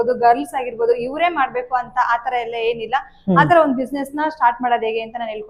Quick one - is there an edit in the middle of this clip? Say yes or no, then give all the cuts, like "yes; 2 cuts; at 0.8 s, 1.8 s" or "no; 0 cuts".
no; 0 cuts